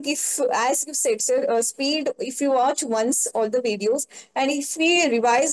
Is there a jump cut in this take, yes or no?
no